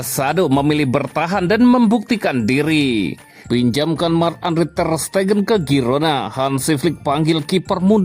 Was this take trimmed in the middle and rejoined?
yes; 1 cut; at 3.3 s

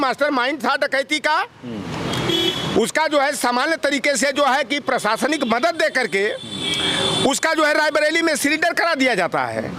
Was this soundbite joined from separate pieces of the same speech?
no; 0 cuts

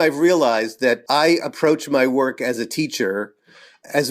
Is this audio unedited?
no; 1 cut; at 1.0 s

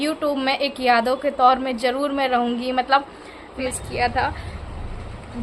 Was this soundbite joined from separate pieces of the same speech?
yes; 1 cut; at 3.6 s

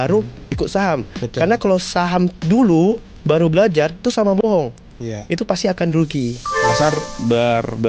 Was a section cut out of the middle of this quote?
yes; 1 cut; at 6.7 s

